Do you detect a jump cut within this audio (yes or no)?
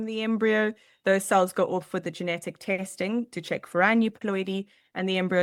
no